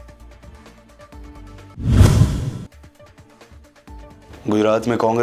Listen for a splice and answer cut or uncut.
uncut